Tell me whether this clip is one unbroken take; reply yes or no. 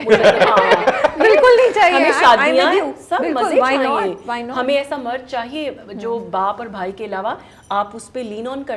yes